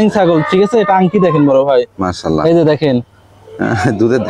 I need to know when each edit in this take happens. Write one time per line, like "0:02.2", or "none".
none